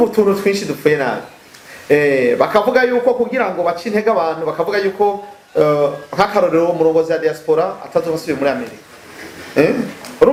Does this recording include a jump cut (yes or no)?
no